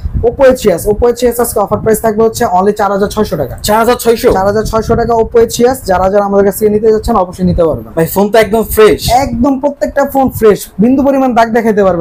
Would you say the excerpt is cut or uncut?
uncut